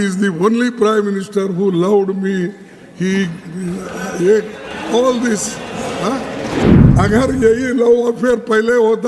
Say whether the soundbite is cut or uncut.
cut